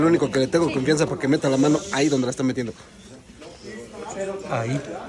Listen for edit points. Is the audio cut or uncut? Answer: uncut